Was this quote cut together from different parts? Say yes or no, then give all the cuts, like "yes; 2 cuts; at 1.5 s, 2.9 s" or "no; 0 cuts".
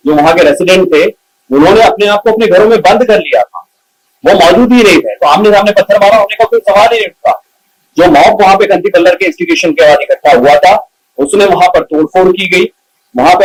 no; 0 cuts